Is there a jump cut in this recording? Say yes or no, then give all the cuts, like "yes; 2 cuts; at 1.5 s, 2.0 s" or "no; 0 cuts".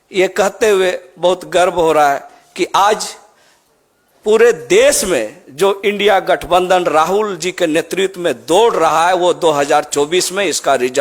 no; 0 cuts